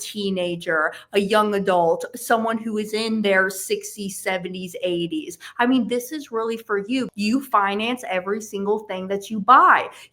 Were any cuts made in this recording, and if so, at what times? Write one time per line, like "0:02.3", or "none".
0:07.1